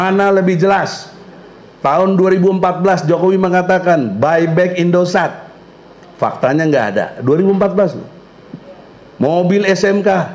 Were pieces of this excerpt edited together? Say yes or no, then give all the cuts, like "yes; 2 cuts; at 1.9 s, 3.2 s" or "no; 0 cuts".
no; 0 cuts